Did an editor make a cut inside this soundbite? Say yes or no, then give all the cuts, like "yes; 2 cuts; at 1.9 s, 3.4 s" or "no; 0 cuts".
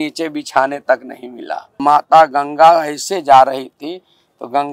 yes; 1 cut; at 1.8 s